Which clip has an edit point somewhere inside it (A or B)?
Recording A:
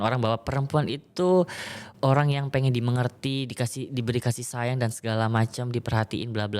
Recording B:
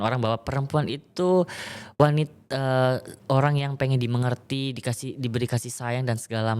A